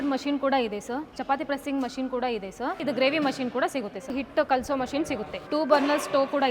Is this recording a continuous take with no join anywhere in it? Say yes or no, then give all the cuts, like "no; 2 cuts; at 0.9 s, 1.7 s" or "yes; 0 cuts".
no; 3 cuts; at 2.8 s, 4.1 s, 5.3 s